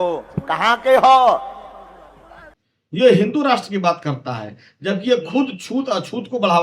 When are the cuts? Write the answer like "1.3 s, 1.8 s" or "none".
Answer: none